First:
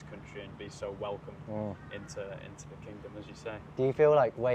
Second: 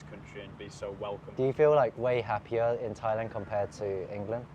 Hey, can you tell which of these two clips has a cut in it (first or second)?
second